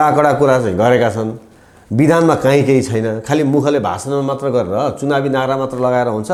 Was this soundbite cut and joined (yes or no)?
no